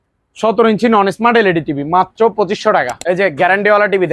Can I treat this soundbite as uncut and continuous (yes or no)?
no